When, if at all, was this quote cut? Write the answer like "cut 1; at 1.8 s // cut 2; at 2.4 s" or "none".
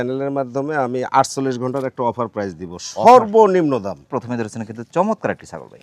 none